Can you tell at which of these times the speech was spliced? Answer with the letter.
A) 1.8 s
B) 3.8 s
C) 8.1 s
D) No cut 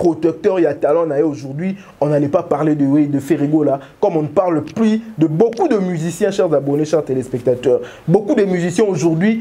D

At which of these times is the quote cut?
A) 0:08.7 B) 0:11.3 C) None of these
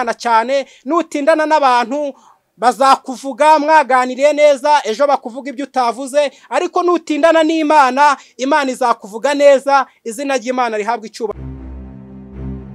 B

